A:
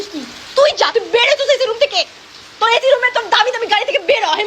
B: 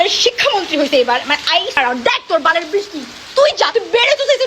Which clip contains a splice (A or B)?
B